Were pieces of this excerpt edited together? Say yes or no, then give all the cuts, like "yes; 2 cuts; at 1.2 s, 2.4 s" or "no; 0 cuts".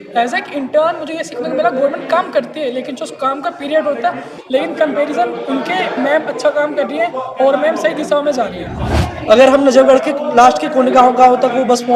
yes; 1 cut; at 4.3 s